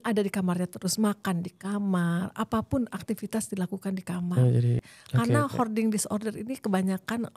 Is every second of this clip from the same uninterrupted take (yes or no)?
no